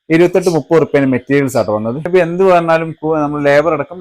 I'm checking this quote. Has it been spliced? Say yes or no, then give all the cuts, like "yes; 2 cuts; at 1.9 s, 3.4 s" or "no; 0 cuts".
yes; 1 cut; at 2.0 s